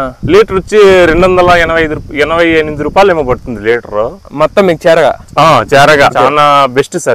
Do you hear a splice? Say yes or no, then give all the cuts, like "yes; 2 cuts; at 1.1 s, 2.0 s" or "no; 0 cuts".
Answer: yes; 1 cut; at 6.1 s